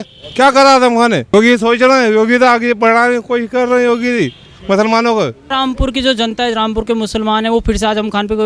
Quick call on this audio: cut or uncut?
cut